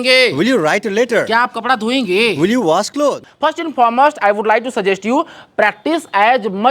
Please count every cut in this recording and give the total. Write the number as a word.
one